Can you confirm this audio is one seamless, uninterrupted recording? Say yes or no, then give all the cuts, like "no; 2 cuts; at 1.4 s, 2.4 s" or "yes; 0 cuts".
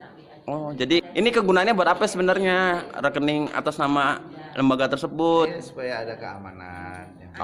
no; 1 cut; at 1.0 s